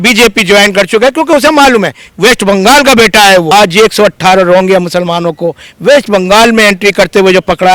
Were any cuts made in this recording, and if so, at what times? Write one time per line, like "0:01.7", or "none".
0:03.5